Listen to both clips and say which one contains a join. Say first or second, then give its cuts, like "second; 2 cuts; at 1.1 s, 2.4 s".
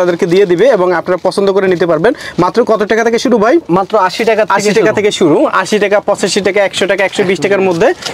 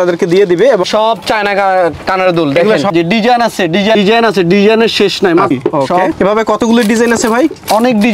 second; 3 cuts; at 0.9 s, 2.9 s, 5.5 s